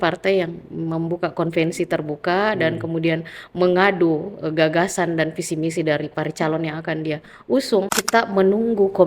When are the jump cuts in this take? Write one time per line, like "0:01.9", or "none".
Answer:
0:07.9